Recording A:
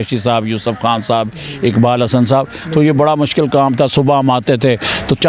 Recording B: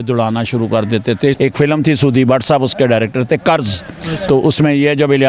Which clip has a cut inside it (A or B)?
B